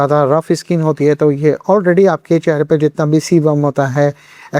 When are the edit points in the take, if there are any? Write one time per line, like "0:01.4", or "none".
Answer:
none